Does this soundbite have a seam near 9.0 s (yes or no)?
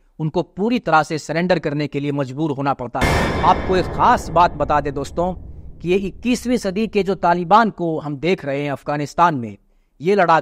no